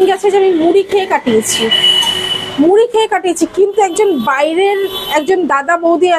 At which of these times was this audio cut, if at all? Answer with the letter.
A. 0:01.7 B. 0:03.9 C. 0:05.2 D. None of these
D